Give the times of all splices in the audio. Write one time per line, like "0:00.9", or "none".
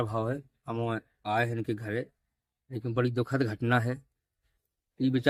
none